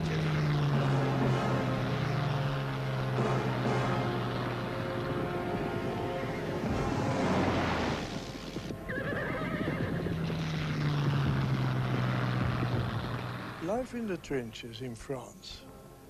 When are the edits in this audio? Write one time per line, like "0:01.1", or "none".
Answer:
none